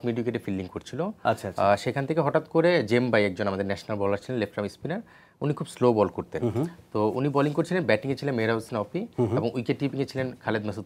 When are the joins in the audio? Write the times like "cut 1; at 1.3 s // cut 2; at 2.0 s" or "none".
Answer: none